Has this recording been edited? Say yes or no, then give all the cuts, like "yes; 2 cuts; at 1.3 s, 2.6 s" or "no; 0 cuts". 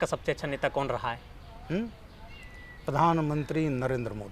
no; 0 cuts